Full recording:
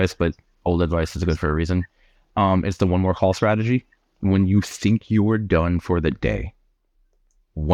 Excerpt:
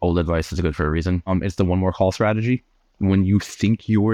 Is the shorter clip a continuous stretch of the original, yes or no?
no